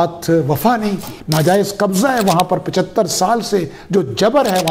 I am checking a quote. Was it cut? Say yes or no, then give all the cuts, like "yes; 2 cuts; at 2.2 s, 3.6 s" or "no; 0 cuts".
yes; 1 cut; at 1.1 s